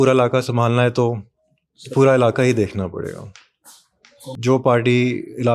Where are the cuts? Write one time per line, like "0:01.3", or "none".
0:04.4